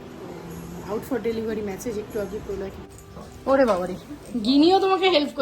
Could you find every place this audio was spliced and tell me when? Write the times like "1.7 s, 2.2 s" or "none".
2.8 s